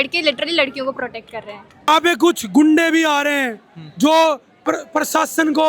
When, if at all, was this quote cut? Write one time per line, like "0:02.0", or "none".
0:01.9